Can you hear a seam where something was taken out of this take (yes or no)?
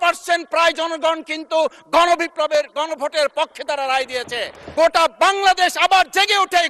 yes